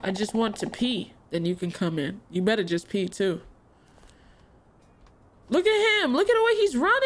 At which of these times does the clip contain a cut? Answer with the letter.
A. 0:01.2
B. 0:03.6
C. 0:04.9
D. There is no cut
A